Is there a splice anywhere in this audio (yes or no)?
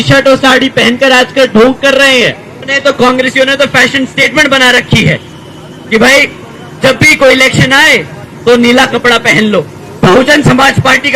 yes